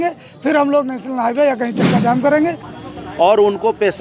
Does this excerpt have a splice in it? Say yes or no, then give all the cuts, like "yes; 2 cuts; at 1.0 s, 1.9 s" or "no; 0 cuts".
yes; 1 cut; at 2.7 s